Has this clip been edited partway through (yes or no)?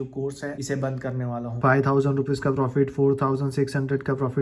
yes